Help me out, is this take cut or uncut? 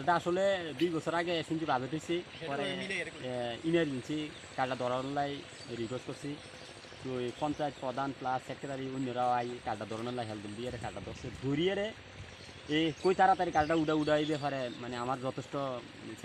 uncut